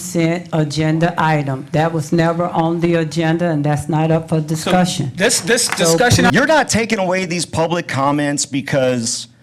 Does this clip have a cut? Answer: yes; 1 cut; at 6.3 s

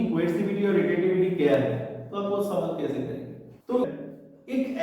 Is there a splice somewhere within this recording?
yes; 1 cut; at 3.9 s

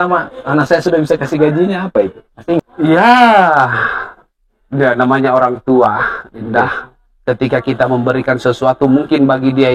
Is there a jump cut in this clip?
yes; 1 cut; at 2.6 s

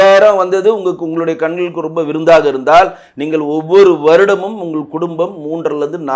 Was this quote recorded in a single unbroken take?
yes; 0 cuts

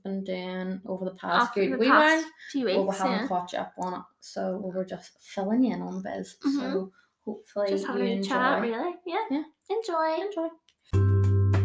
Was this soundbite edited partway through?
yes; 1 cut; at 10.7 s

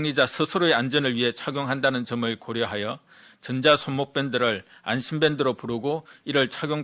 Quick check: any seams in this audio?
no; 0 cuts

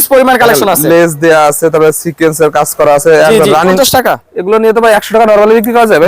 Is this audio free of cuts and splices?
no; 1 cut; at 3.8 s

